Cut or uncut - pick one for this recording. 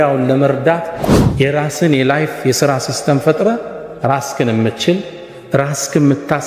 cut